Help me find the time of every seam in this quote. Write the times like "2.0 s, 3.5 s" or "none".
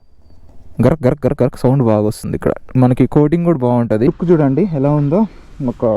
4.1 s